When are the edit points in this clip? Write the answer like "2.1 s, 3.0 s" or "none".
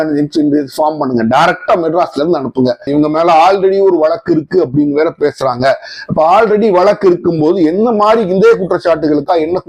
2.9 s